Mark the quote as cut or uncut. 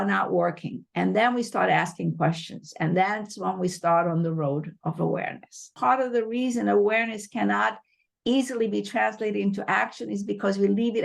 cut